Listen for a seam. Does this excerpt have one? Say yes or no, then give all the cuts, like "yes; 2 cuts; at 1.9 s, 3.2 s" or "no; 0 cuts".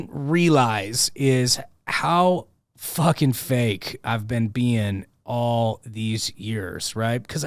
no; 0 cuts